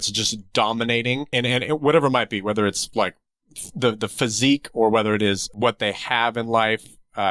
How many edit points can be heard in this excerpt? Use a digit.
2